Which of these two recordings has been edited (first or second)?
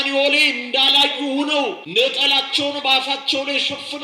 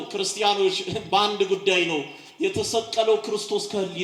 first